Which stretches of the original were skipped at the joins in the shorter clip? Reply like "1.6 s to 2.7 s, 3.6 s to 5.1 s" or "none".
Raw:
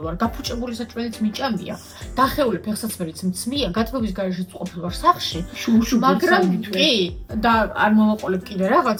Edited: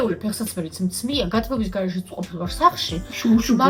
none